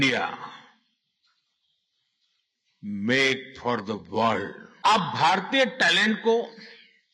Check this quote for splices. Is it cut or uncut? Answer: cut